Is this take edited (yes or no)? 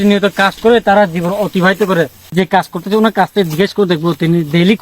yes